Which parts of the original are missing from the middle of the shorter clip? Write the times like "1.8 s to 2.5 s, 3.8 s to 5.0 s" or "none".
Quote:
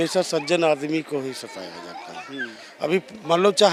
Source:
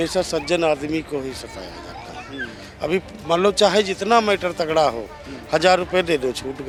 none